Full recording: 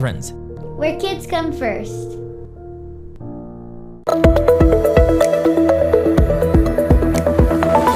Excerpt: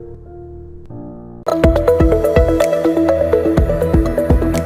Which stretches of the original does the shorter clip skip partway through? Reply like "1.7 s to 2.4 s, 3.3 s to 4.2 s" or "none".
3.7 s to 4.0 s